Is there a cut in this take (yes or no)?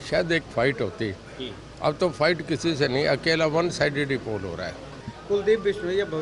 yes